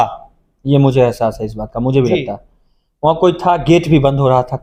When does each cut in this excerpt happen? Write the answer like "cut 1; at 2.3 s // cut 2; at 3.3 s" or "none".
none